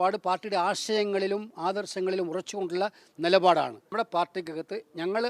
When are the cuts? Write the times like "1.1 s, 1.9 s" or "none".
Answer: 3.8 s